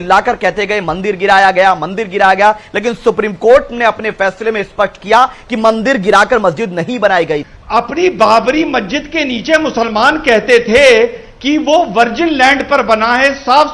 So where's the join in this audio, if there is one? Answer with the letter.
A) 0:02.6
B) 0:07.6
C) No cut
B